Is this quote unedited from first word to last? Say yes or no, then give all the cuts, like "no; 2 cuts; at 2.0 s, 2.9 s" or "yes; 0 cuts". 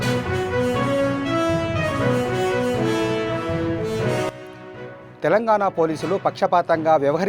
no; 1 cut; at 4.5 s